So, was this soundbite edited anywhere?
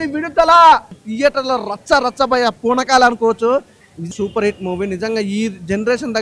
yes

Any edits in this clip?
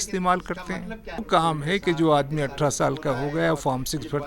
yes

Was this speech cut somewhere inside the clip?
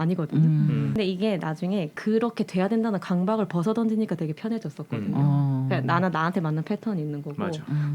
yes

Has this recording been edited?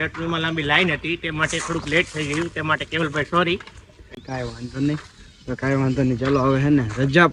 no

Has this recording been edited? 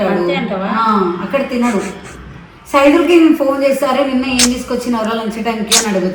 no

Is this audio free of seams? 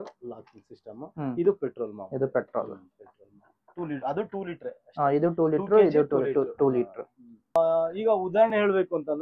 no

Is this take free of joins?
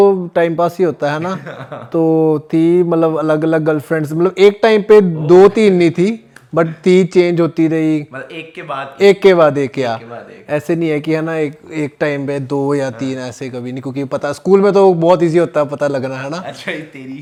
yes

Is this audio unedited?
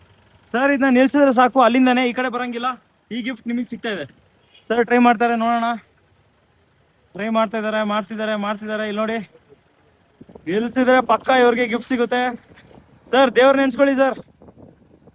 yes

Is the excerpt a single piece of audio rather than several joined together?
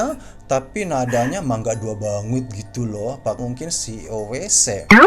no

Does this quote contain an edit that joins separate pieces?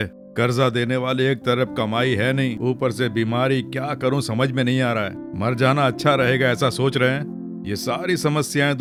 no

